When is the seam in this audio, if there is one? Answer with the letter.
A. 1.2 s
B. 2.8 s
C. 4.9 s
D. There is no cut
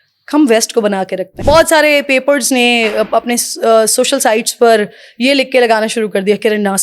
A